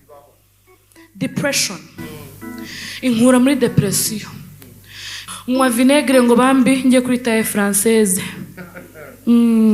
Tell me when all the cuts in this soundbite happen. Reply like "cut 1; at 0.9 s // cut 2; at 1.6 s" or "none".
cut 1; at 5.2 s

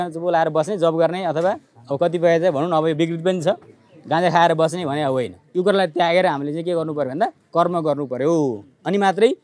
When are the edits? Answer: cut 1; at 5.4 s // cut 2; at 7.4 s

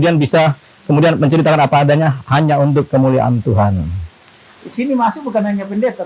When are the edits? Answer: none

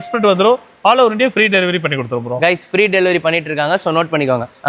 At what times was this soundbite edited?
none

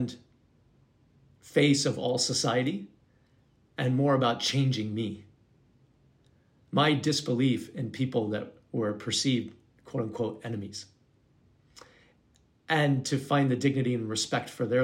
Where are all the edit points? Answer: none

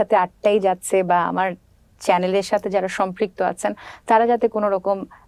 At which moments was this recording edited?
none

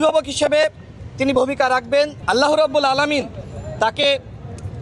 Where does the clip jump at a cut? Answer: cut 1; at 2.2 s

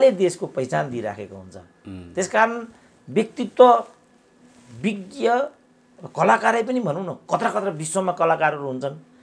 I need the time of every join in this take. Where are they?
none

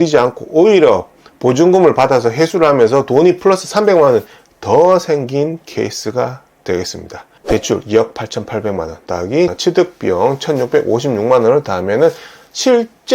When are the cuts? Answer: cut 1; at 7.4 s // cut 2; at 9.6 s

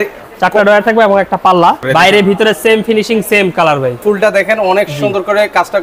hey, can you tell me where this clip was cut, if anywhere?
cut 1; at 1.8 s // cut 2; at 4.0 s

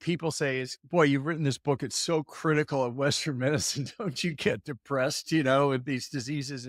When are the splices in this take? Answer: none

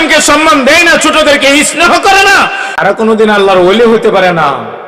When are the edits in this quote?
none

